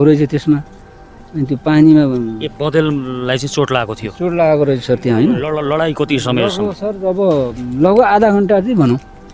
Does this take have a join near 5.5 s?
yes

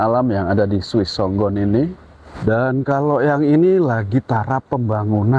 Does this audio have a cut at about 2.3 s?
yes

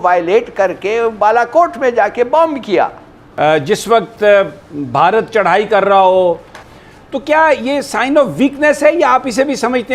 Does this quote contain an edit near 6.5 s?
yes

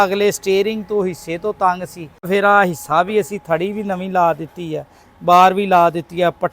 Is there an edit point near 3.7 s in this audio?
no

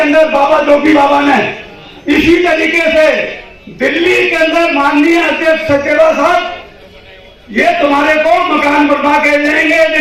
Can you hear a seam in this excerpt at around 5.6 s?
no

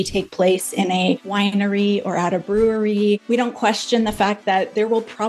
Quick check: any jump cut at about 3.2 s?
yes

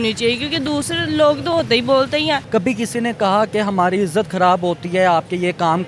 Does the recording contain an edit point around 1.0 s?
no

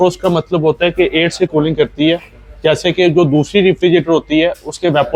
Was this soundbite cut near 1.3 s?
no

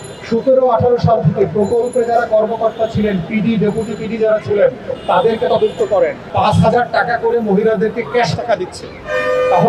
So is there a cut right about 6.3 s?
yes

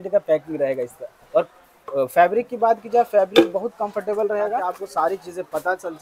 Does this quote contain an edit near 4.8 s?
yes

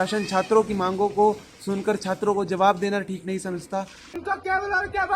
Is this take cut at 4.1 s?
yes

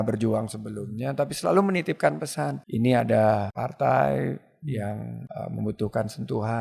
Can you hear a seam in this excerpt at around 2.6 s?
yes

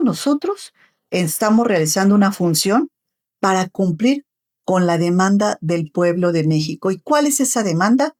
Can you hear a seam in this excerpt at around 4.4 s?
no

